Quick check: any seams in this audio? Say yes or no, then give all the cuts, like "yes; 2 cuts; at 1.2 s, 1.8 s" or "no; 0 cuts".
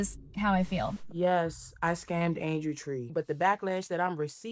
yes; 2 cuts; at 1.0 s, 3.1 s